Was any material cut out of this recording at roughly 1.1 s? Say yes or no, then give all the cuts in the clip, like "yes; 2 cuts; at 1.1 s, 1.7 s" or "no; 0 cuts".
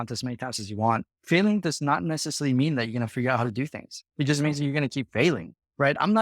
yes; 1 cut; at 1.1 s